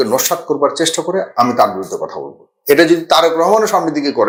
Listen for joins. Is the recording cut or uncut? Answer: uncut